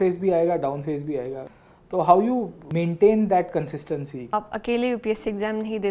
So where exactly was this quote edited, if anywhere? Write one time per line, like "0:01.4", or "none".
0:01.5
0:02.6
0:04.3